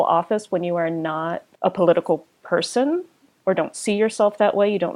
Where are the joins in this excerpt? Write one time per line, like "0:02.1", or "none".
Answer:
0:01.5

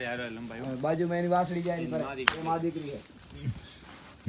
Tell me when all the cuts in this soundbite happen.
none

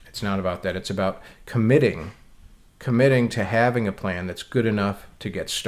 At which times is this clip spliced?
none

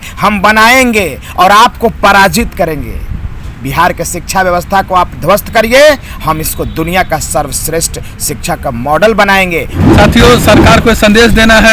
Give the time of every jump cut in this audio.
0:09.7

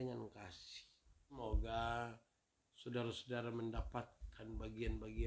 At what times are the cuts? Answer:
0:01.4

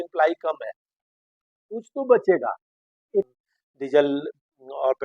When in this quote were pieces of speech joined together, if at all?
0:03.3

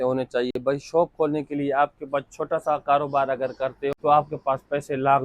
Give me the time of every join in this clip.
0:04.0

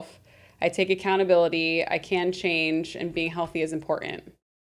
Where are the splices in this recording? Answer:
none

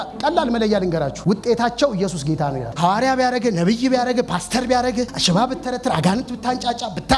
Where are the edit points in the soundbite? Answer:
0:01.2
0:02.7
0:05.2

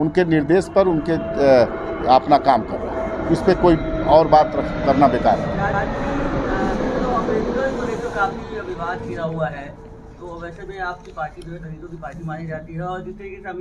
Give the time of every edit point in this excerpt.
none

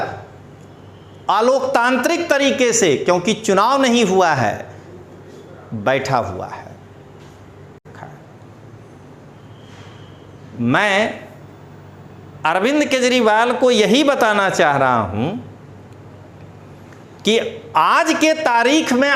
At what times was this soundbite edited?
0:07.9

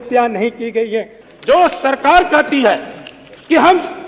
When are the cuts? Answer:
0:01.2

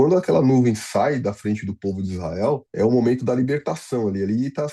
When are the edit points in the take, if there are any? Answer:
0:02.7

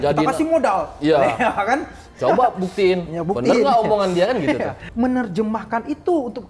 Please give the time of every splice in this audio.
0:04.8

